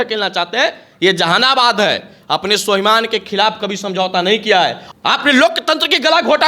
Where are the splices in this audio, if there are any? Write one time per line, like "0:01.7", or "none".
0:04.8